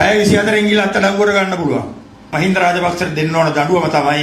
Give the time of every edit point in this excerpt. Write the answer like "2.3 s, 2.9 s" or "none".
none